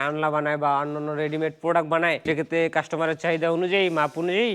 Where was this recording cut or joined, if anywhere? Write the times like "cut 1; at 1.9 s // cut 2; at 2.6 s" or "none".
cut 1; at 2.2 s